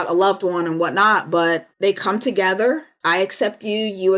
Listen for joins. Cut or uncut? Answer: cut